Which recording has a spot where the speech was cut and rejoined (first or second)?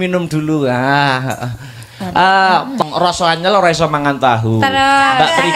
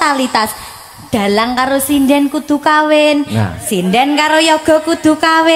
first